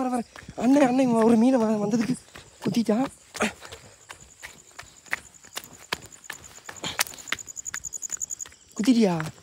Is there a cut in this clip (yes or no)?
no